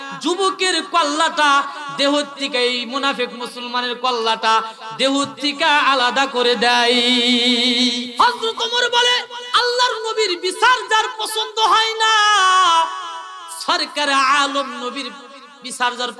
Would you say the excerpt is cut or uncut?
cut